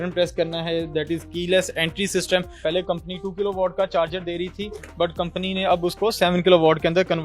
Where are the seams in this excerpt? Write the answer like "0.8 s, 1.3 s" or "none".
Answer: 2.6 s